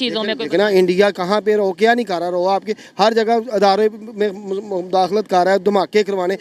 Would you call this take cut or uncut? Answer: uncut